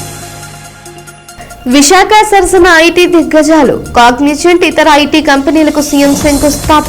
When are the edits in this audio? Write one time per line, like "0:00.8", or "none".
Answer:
0:01.2